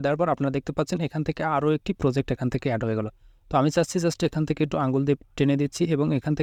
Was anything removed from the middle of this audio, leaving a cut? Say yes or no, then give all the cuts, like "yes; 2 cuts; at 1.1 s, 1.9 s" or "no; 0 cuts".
no; 0 cuts